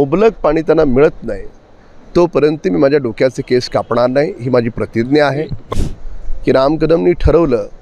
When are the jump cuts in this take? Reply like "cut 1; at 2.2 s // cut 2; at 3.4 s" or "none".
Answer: cut 1; at 5.6 s